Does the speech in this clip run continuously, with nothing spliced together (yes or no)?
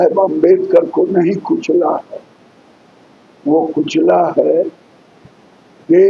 yes